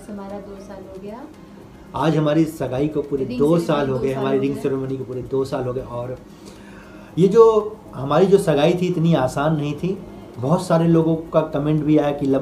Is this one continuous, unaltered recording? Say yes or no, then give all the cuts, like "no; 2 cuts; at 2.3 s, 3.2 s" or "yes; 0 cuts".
yes; 0 cuts